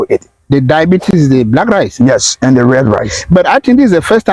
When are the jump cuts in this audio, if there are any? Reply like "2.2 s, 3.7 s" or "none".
none